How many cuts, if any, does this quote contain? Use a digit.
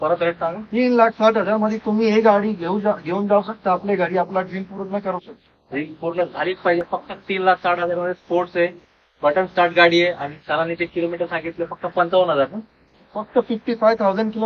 0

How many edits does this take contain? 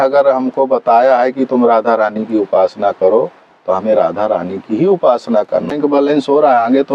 1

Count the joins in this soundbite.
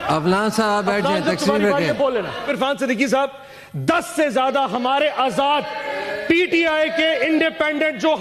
1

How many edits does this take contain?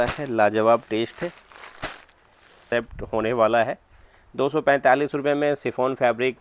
1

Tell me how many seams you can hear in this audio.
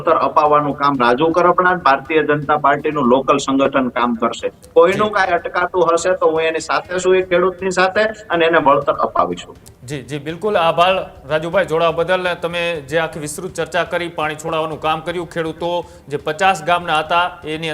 0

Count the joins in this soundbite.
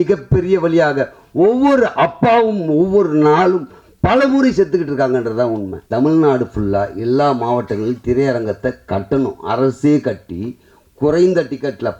1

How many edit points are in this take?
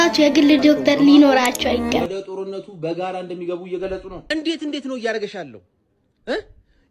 1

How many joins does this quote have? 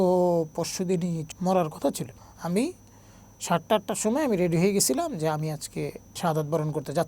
3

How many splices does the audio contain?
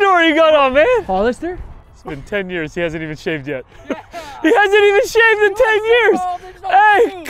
1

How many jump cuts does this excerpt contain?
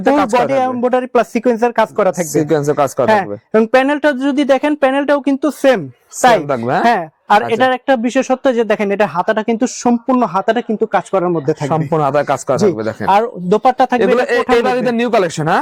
0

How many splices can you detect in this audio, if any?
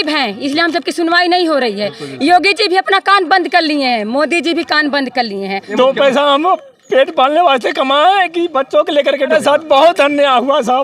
2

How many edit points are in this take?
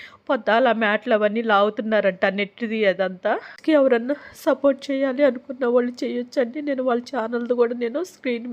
1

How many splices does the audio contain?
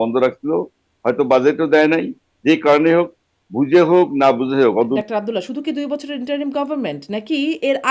1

